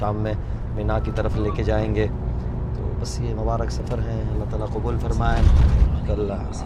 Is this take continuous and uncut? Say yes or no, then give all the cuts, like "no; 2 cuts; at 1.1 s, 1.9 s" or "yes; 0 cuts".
yes; 0 cuts